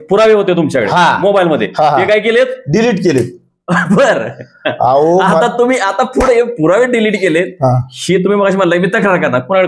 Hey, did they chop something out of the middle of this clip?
no; 0 cuts

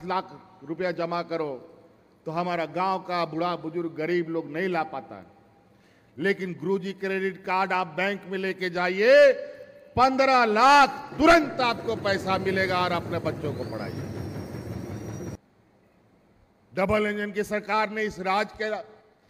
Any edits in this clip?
yes; 1 cut; at 15.3 s

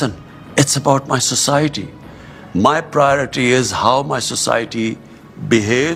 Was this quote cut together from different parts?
no; 0 cuts

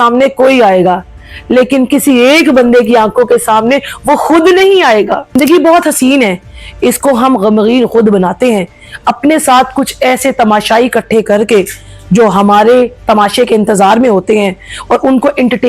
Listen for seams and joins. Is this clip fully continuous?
no; 1 cut; at 5.4 s

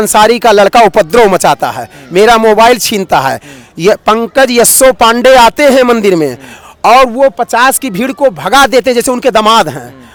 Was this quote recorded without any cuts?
yes; 0 cuts

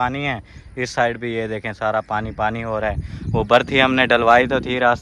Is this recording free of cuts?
yes; 0 cuts

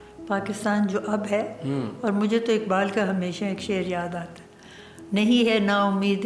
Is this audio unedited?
yes; 0 cuts

